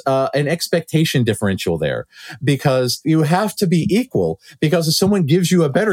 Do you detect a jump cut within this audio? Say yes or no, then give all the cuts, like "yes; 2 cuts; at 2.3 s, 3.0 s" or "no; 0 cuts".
yes; 1 cut; at 3.0 s